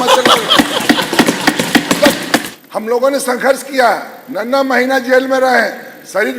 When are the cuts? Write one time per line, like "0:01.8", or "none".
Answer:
0:02.5